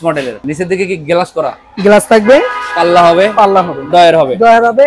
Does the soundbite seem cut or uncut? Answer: uncut